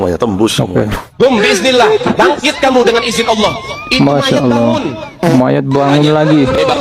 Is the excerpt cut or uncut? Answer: cut